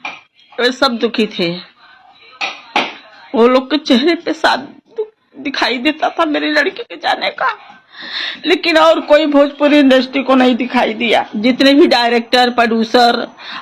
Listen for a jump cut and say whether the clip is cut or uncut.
uncut